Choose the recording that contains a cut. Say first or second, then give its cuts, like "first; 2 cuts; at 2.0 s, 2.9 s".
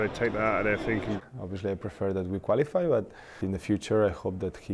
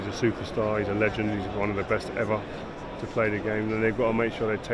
first; 2 cuts; at 1.2 s, 3.4 s